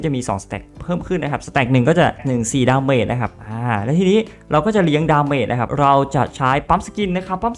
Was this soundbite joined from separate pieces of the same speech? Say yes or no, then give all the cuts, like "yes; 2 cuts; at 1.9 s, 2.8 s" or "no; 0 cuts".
yes; 2 cuts; at 2.2 s, 5.7 s